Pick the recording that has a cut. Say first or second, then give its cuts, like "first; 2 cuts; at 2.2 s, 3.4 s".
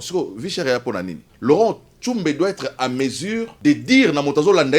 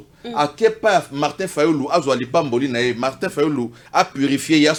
first; 2 cuts; at 1.2 s, 3.5 s